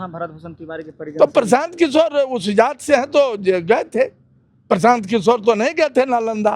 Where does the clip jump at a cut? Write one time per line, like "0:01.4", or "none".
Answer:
none